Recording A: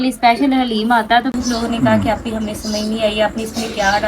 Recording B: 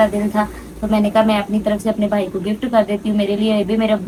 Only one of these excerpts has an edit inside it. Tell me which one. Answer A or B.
A